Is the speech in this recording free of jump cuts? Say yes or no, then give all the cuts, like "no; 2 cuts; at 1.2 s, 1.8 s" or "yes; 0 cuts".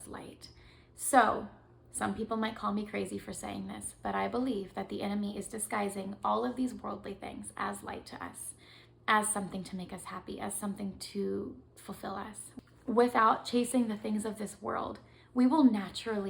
no; 1 cut; at 12.6 s